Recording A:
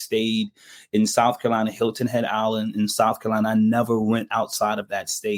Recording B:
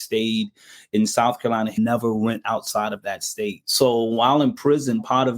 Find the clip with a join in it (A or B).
B